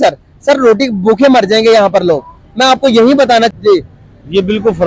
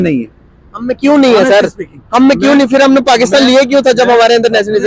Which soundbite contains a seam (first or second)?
first